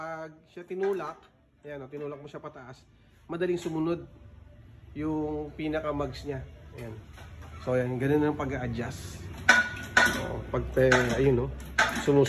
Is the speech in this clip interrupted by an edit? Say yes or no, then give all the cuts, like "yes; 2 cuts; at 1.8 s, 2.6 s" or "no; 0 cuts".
no; 0 cuts